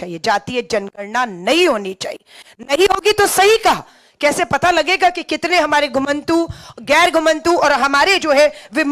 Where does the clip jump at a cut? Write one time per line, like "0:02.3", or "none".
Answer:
none